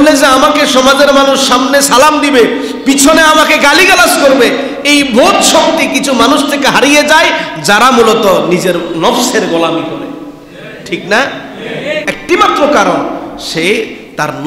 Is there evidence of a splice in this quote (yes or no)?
yes